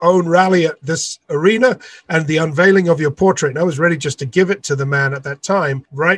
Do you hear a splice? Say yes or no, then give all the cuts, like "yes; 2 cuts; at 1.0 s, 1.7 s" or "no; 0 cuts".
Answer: no; 0 cuts